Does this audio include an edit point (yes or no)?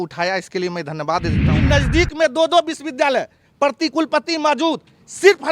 yes